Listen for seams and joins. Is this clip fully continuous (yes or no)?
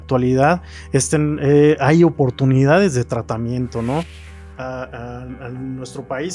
no